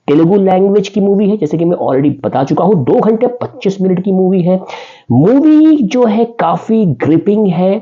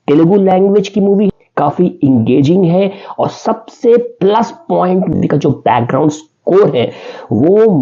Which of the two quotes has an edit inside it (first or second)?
second